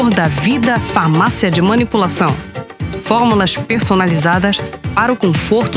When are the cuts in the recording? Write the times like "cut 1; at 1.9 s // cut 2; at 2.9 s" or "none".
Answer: none